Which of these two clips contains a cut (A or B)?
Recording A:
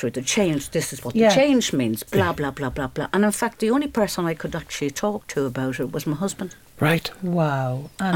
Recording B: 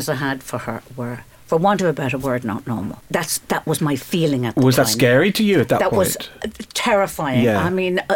B